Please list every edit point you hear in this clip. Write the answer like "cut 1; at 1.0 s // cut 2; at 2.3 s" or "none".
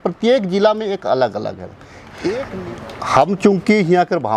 cut 1; at 2.6 s